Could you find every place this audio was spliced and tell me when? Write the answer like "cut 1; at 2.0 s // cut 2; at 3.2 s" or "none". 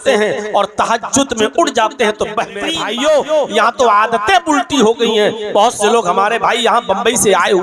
cut 1; at 2.8 s